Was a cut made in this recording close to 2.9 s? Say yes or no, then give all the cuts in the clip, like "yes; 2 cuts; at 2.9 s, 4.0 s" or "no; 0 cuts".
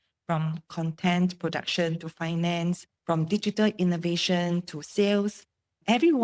yes; 1 cut; at 2.9 s